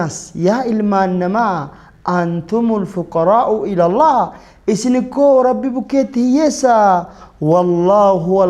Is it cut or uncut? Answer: uncut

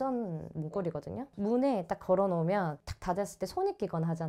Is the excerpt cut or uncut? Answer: cut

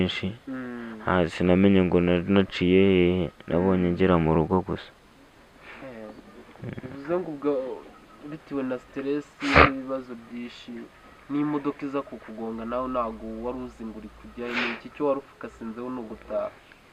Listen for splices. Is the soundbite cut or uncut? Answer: uncut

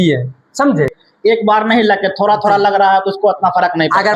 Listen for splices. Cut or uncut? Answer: cut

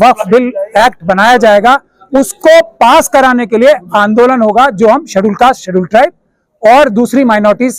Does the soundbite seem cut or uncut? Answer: uncut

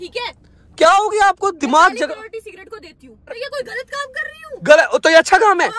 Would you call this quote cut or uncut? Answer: cut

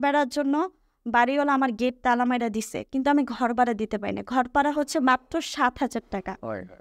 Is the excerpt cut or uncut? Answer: uncut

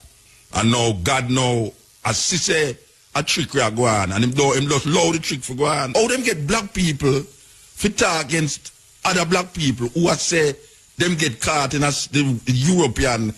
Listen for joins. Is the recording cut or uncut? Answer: cut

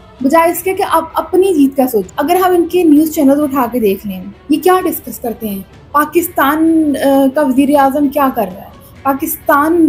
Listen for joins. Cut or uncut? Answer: cut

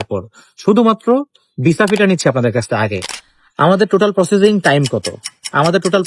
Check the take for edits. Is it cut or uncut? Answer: cut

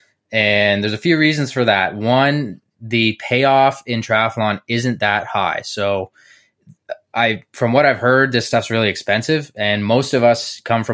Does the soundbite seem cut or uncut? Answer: uncut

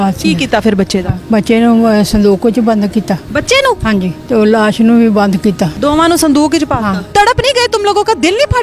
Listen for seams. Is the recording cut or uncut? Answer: cut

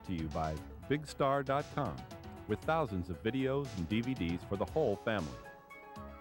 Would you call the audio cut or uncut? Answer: cut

